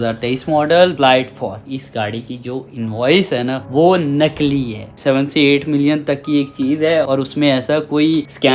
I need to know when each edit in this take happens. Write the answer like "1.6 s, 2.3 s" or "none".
1.6 s, 4.9 s